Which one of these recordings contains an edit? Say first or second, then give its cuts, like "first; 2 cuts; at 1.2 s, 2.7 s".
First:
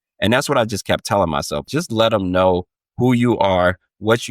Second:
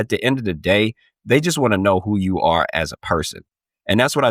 first; 1 cut; at 1.7 s